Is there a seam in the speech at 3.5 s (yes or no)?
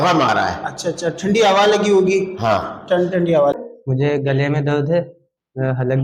yes